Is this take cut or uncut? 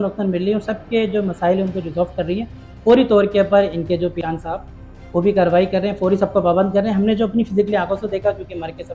uncut